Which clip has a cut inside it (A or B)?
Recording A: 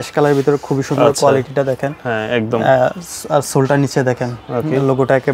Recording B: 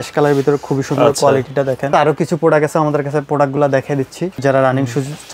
B